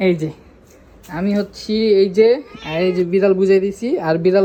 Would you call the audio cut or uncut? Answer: uncut